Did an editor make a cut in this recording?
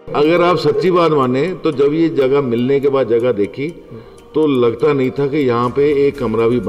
no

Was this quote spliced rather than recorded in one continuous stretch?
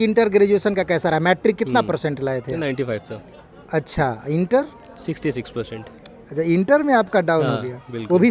no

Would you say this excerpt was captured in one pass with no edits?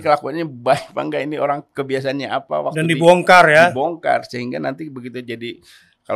yes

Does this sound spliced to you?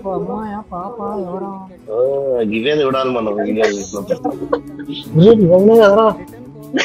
yes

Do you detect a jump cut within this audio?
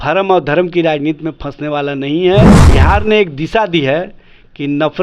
yes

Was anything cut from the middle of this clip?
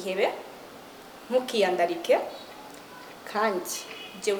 no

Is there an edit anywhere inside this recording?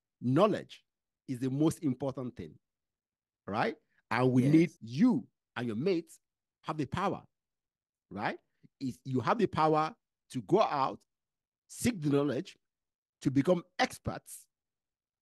yes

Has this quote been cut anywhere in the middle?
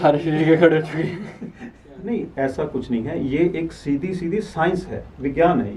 yes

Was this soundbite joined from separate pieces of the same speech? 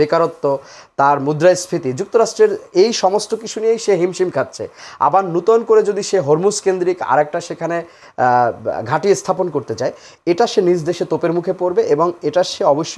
no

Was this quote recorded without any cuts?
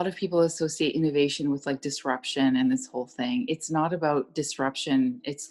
yes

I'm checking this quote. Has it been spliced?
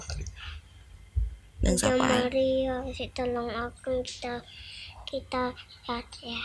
no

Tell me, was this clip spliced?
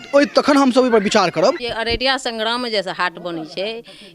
yes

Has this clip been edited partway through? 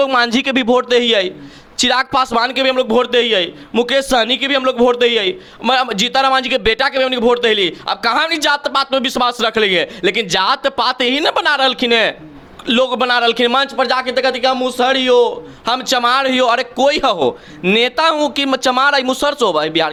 no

